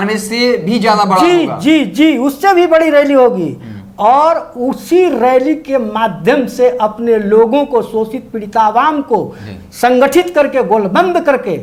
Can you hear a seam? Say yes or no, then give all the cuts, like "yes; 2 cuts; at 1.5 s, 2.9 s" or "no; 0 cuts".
no; 0 cuts